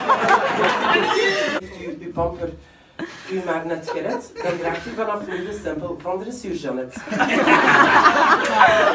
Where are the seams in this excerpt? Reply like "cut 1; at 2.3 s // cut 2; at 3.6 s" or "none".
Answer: cut 1; at 1.7 s

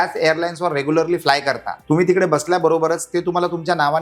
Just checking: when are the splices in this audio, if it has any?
cut 1; at 1.7 s

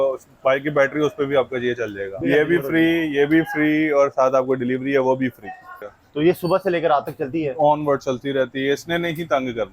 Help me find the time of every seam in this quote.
cut 1; at 2.2 s // cut 2; at 5.7 s

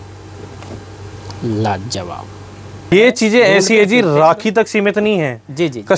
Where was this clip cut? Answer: cut 1; at 2.9 s

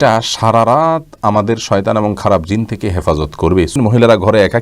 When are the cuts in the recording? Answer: cut 1; at 3.7 s

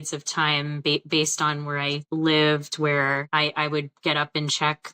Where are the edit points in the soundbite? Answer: cut 1; at 2.0 s // cut 2; at 3.2 s

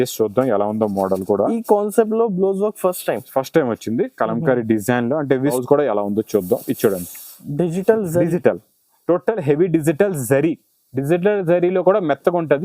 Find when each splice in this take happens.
cut 1; at 5.5 s

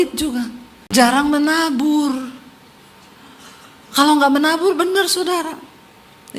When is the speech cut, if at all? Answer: cut 1; at 1.0 s

